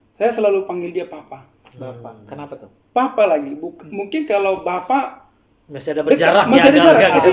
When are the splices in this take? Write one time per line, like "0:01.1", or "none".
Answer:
none